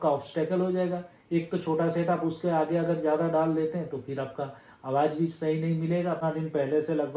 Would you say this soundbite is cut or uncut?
cut